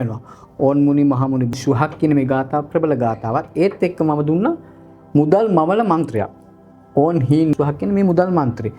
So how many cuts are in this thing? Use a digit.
2